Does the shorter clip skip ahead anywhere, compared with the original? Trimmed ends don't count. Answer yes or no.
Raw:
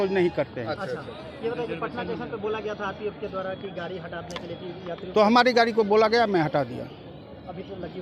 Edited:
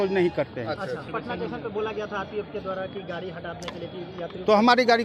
yes